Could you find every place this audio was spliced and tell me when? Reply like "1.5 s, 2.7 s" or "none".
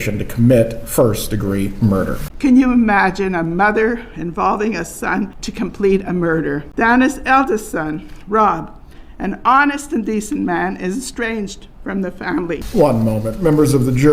2.2 s, 5.4 s, 6.7 s, 12.6 s